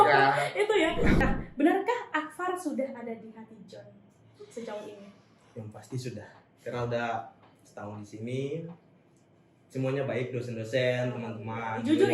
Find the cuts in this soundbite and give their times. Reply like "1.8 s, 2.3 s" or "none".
1.1 s